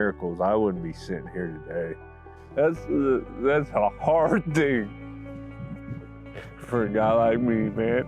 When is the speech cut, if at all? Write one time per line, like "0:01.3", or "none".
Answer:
0:02.3